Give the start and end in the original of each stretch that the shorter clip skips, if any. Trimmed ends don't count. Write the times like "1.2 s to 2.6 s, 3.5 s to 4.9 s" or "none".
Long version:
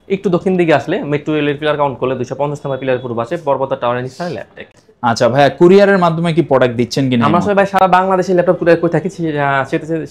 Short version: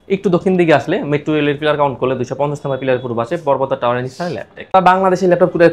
4.7 s to 7.8 s